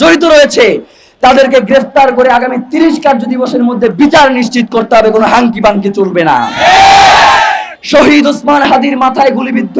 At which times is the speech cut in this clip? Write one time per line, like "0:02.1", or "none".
0:07.7